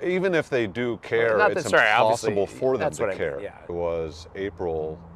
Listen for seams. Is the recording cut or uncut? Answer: cut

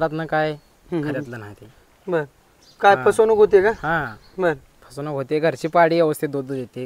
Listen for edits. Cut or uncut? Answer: uncut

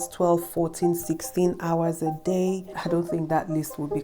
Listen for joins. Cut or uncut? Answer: cut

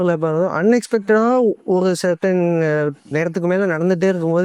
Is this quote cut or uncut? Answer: uncut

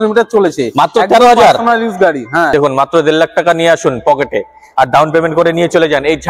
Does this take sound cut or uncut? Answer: cut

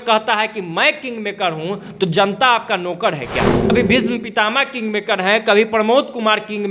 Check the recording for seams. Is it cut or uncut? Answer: cut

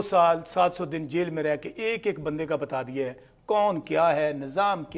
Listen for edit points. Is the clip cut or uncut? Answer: uncut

